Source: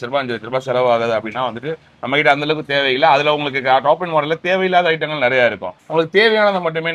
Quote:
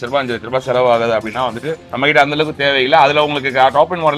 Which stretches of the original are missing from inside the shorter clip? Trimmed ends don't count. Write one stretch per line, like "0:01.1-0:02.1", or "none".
0:01.8-0:01.9